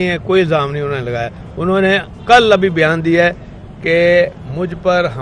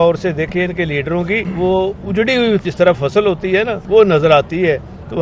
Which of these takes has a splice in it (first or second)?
second